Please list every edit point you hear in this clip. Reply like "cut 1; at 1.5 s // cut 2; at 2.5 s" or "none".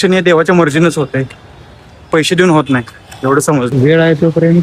cut 1; at 3.7 s

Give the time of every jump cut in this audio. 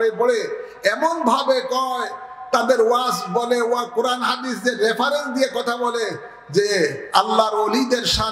none

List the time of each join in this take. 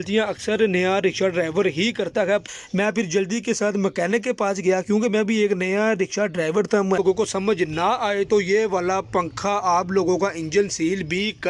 cut 1; at 2.4 s // cut 2; at 7.0 s

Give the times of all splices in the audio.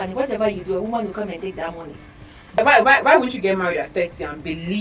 cut 1; at 2.6 s

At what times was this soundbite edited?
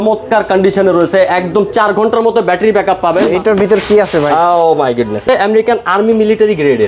cut 1; at 3.3 s // cut 2; at 5.3 s

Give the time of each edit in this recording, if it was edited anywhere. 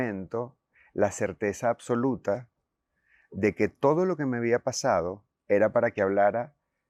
none

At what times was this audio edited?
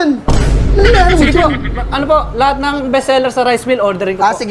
none

